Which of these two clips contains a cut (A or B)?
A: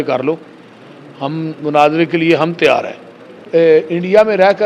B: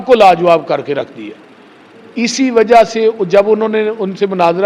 A